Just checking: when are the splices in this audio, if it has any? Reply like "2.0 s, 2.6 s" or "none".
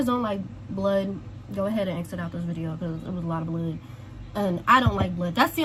none